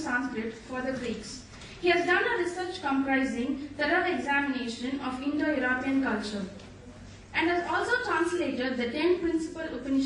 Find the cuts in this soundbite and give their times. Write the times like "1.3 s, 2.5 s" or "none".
7.2 s